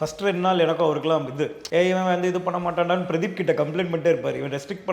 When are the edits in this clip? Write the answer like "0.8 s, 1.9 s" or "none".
1.6 s